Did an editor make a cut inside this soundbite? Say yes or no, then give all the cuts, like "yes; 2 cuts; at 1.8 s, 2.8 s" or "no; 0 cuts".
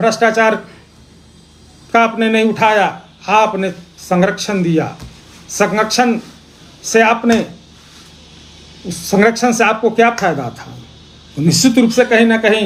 no; 0 cuts